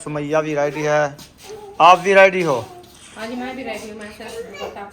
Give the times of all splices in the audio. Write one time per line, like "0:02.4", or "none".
none